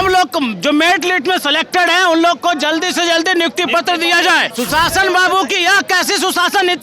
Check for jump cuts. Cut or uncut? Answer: cut